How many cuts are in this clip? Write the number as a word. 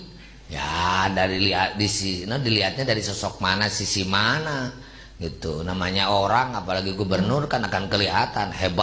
zero